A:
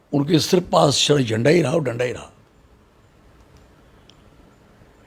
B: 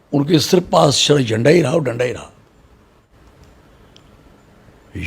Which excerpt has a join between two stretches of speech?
B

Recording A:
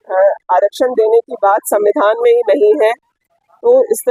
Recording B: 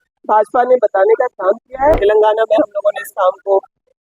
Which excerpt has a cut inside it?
B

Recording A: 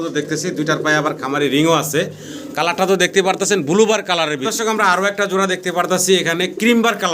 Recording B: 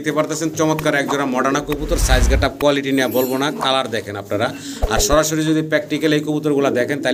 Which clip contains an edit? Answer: A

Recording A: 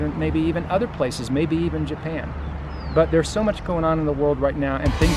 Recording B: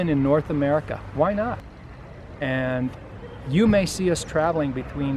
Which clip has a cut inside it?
B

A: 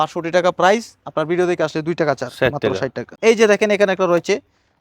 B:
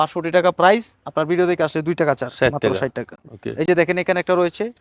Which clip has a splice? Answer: A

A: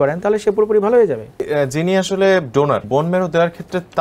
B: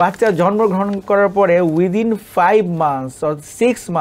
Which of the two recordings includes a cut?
A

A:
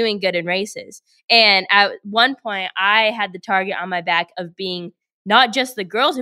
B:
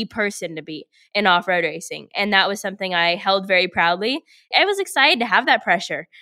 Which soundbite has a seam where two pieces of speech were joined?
B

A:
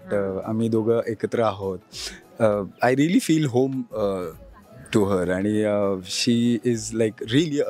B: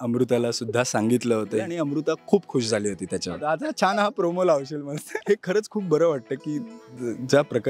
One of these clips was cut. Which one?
B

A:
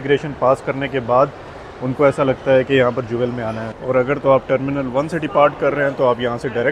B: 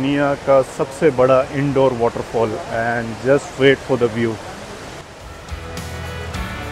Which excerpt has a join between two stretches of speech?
A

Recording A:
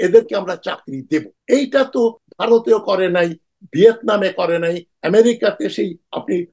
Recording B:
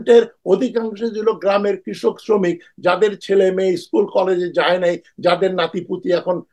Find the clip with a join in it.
A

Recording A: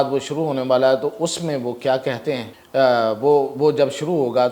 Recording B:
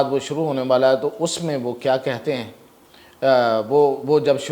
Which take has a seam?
A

